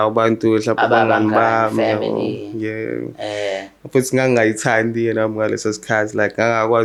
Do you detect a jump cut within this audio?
no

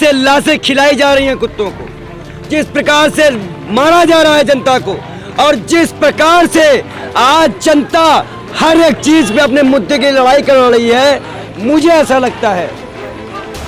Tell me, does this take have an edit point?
no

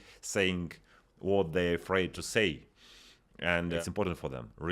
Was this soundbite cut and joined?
yes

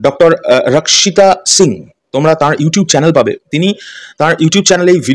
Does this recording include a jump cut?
no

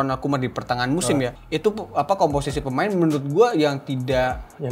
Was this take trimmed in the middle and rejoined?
yes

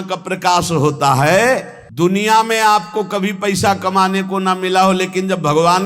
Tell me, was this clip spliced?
yes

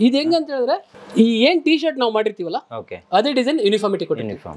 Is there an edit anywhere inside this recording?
yes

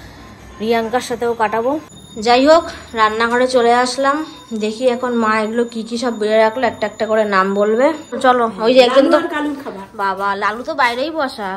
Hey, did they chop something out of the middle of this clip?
yes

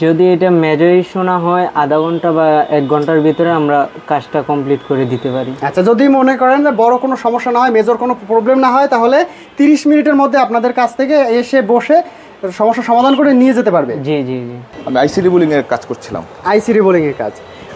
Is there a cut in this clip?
no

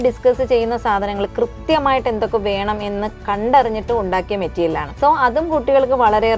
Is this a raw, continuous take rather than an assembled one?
no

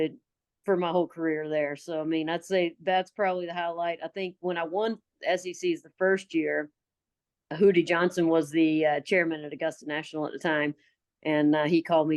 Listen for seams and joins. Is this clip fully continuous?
yes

